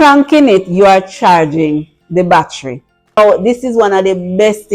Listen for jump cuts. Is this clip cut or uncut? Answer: cut